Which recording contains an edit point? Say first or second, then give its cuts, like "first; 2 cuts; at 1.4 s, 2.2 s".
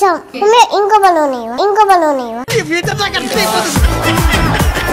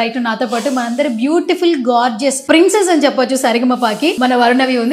second; 2 cuts; at 2.4 s, 4.2 s